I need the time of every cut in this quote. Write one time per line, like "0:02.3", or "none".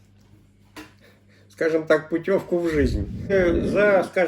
0:03.3